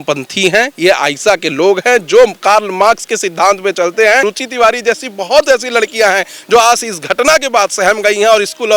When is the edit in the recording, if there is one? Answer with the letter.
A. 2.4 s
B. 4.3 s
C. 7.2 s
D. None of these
B